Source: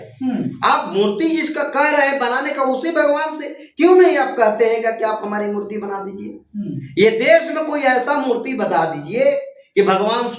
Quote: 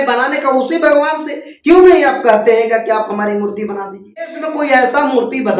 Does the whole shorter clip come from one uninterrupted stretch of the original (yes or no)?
no